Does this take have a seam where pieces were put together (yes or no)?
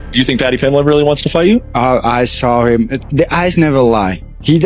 no